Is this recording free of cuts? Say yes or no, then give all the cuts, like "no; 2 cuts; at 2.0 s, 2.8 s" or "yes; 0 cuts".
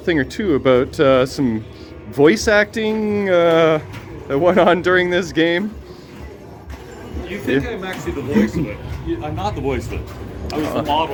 yes; 0 cuts